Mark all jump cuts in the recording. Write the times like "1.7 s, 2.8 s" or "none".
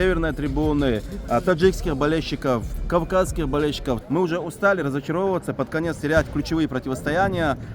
4.0 s